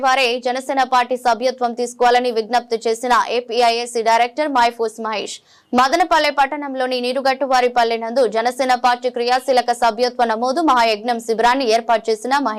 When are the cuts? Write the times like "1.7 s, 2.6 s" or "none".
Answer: none